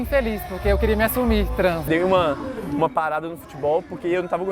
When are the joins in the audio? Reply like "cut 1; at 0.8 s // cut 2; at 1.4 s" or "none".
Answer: cut 1; at 1.8 s